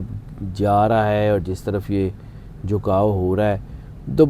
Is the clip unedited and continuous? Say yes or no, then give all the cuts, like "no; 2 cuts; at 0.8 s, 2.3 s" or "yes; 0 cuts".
yes; 0 cuts